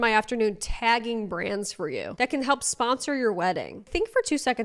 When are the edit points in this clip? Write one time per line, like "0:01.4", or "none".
0:02.1
0:03.9